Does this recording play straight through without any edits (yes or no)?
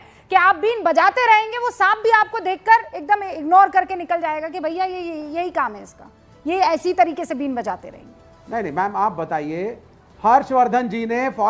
yes